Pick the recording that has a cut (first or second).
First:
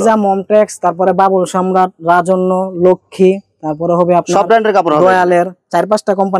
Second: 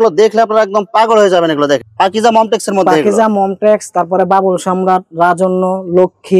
second